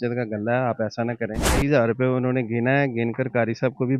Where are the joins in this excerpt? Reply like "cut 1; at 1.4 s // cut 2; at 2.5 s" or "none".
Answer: cut 1; at 1.6 s